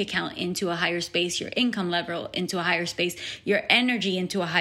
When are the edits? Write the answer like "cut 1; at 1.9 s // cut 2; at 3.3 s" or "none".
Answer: none